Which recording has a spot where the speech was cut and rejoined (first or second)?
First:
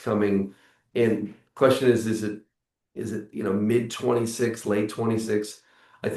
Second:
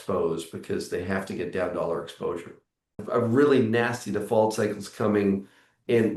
second